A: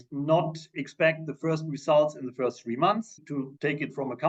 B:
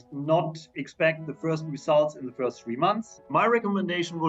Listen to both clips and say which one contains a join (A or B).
B